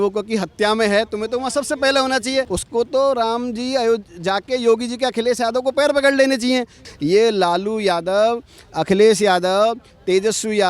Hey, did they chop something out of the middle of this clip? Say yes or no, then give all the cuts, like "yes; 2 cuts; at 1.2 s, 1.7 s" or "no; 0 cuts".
yes; 2 cuts; at 2.6 s, 6.8 s